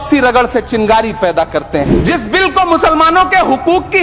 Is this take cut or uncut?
cut